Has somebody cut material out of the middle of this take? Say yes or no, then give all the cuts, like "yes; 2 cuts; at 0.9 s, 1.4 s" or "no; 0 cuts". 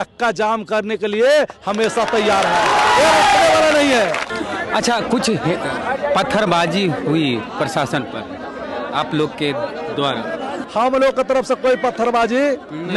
no; 0 cuts